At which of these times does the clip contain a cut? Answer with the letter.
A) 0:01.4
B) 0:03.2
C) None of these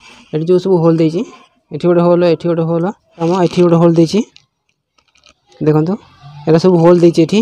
B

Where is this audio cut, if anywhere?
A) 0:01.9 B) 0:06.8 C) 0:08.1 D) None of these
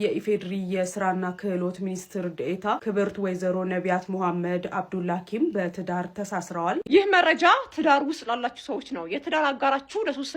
B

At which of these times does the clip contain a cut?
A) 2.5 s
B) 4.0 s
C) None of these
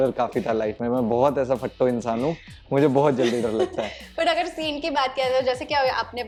C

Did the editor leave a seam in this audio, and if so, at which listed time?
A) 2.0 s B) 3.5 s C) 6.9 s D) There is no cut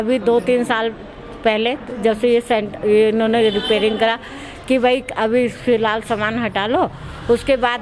D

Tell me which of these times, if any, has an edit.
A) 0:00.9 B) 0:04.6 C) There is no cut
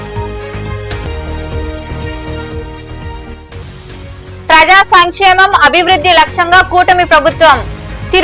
A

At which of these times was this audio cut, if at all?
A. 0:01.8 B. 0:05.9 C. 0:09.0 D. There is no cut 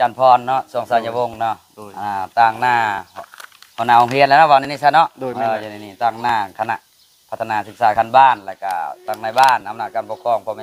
D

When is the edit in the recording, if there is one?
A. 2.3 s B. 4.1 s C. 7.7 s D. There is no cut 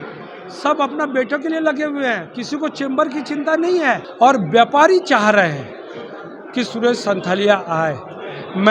B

